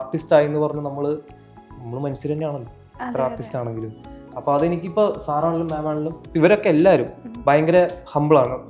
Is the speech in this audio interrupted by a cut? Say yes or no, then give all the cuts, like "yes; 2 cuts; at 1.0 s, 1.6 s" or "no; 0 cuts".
no; 0 cuts